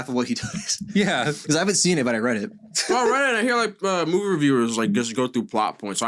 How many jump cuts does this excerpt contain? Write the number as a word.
one